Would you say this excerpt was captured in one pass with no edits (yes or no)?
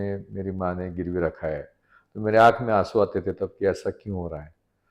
yes